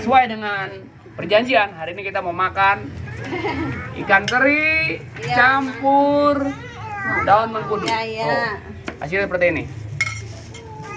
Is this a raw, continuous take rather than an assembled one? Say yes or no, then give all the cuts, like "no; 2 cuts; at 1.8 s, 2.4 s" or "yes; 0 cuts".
yes; 0 cuts